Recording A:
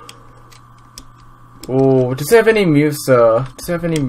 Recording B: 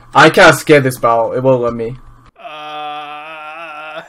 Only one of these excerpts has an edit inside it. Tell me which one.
B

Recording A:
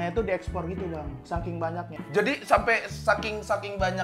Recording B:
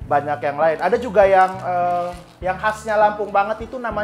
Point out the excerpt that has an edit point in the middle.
A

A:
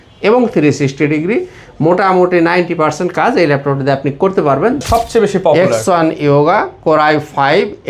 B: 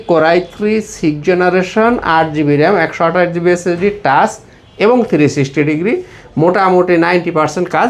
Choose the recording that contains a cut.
A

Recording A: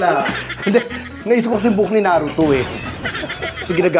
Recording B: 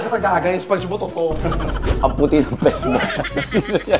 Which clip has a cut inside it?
B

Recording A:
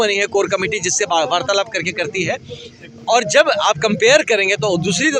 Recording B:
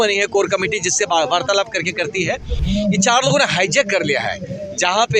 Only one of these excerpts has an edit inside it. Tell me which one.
B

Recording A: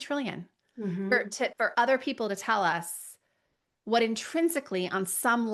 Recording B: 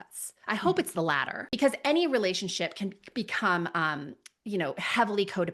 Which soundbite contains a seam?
B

